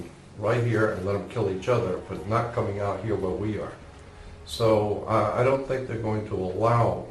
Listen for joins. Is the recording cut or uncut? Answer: uncut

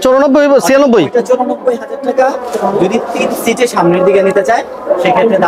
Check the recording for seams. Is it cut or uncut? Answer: uncut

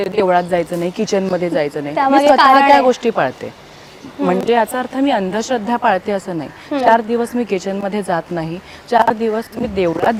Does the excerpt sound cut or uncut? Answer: uncut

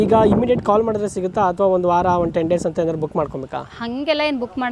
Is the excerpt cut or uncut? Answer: uncut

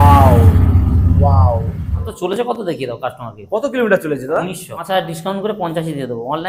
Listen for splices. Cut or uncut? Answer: cut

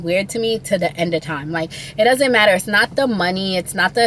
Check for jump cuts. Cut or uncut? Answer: uncut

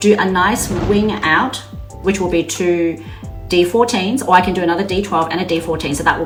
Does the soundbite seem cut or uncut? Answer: uncut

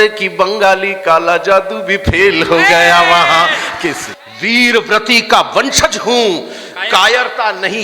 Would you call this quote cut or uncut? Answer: cut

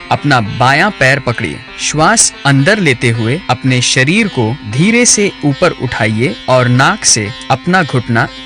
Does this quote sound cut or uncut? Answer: cut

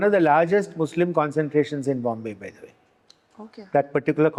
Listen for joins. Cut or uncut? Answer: uncut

